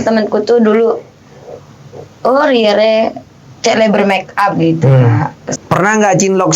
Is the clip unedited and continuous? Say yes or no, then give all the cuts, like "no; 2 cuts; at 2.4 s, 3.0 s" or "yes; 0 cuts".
no; 1 cut; at 5.4 s